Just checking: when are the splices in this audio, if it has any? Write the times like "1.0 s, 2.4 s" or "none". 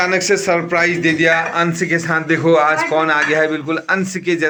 none